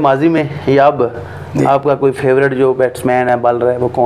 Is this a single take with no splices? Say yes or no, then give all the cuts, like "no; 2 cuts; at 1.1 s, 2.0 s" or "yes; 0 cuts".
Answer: yes; 0 cuts